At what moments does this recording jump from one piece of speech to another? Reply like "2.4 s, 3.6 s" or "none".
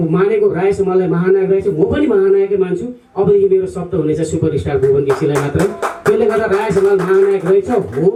none